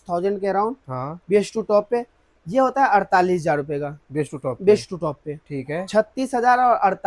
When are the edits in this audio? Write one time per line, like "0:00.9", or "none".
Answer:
none